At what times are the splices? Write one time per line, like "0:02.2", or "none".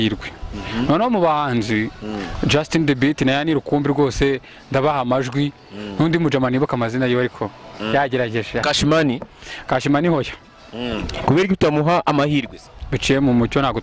none

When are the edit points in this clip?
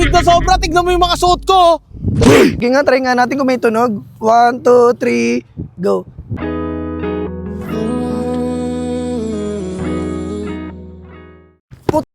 0:02.6

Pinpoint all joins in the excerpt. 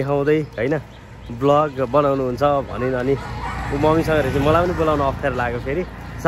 none

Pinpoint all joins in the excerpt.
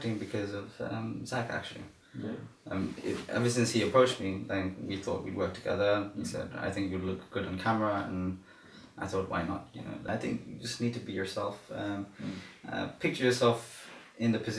0:10.1

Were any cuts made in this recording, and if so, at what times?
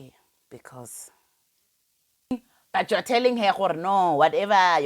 0:02.6

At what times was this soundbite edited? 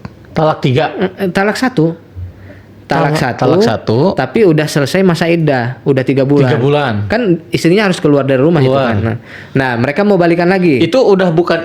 none

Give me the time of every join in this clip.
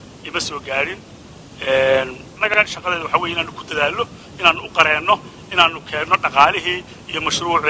0:02.5

